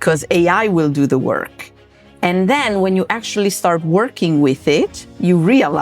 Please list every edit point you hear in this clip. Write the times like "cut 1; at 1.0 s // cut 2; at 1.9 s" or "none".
none